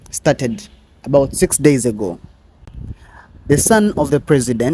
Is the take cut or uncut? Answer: uncut